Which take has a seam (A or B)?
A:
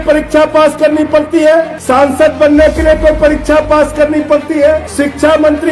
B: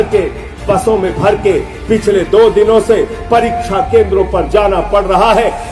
A